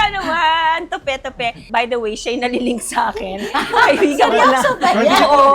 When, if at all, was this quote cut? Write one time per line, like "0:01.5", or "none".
0:01.6